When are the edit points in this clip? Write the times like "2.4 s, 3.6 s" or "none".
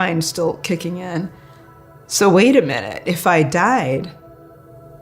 4.1 s